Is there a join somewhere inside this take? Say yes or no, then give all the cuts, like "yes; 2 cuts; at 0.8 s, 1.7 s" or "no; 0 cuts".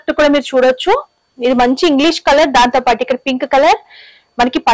no; 0 cuts